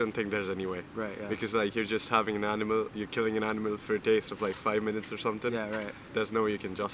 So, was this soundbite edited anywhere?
yes; 1 cut; at 6.0 s

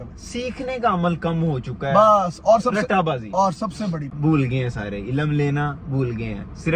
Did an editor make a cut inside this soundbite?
yes; 1 cut; at 4.1 s

